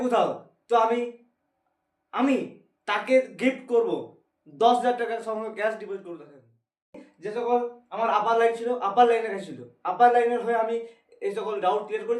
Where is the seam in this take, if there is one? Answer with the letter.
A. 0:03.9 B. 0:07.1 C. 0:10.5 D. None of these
B